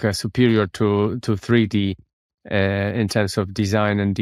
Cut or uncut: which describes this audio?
uncut